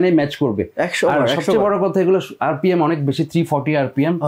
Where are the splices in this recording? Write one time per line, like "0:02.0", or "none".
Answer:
none